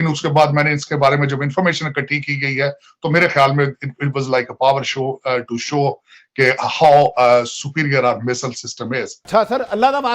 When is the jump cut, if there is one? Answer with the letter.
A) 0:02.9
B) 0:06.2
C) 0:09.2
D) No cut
C